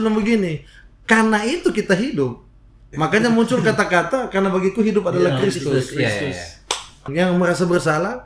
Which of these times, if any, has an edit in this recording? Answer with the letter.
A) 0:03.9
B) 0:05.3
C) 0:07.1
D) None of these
C